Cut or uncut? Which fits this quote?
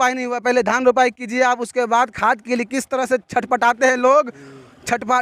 uncut